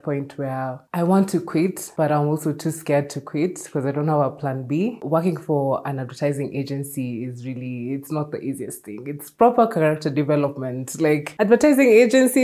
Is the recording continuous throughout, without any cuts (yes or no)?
no